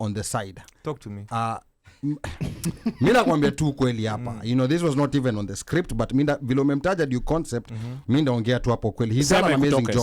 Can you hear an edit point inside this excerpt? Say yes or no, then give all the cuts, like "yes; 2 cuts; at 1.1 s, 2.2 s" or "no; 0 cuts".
no; 0 cuts